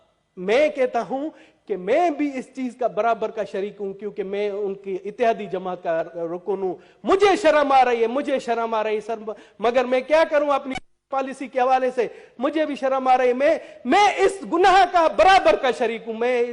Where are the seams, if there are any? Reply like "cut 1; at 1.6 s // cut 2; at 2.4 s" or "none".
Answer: none